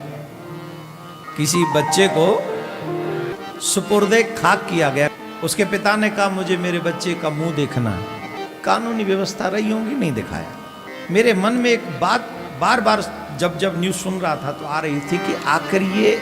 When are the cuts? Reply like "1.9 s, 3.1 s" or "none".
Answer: 1.2 s, 3.3 s, 5.1 s, 8.4 s, 10.9 s